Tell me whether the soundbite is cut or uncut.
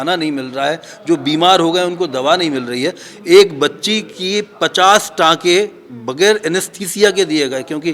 uncut